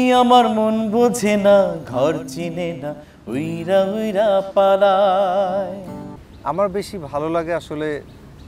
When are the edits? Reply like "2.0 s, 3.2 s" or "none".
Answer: 6.2 s